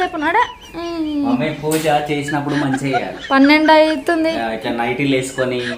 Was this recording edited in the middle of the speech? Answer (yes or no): no